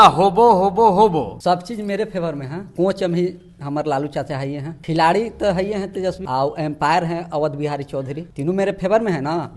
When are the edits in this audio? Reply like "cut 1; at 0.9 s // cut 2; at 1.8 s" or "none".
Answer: cut 1; at 1.3 s // cut 2; at 2.6 s // cut 3; at 4.7 s // cut 4; at 6.2 s // cut 5; at 8.2 s